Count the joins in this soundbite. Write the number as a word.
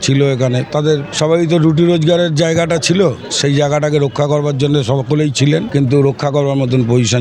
two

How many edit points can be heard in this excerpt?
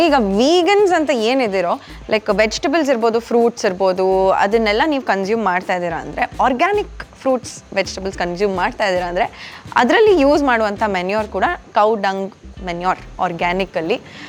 zero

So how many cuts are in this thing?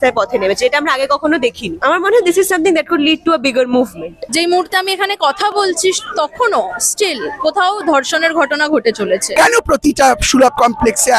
three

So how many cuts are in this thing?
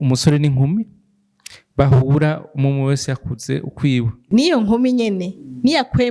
one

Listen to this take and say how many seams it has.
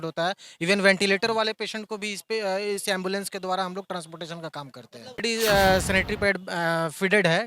one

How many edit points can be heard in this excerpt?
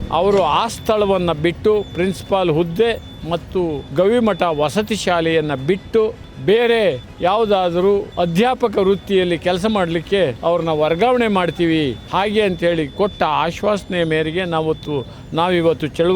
six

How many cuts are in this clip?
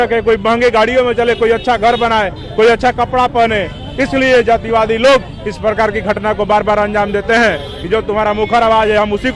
zero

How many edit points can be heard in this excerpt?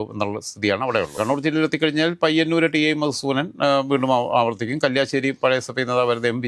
one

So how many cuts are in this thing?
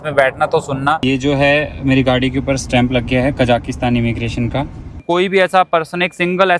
two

